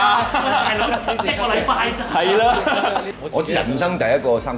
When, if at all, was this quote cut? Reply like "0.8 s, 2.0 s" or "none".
3.2 s